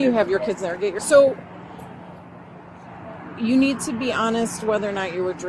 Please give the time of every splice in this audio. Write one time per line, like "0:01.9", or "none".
0:01.0